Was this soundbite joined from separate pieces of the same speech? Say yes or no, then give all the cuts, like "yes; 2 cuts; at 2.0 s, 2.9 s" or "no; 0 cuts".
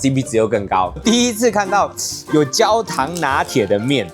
yes; 1 cut; at 1.0 s